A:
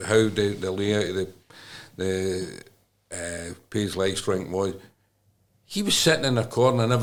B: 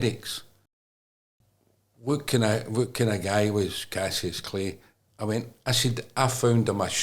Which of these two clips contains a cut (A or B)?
B